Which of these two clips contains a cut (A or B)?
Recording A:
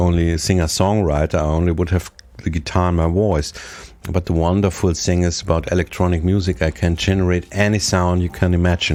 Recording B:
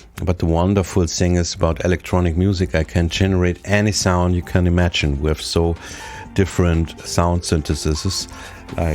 B